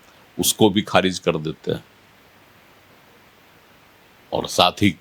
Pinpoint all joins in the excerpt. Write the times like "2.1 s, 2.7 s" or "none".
none